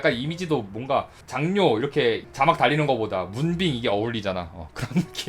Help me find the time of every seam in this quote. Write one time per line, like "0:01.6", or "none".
0:01.2
0:02.2